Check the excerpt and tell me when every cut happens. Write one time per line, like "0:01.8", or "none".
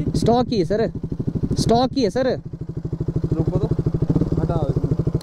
none